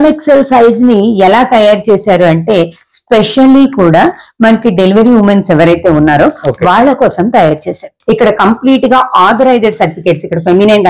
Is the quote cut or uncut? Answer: cut